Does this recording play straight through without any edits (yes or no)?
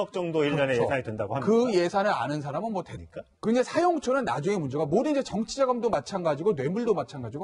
yes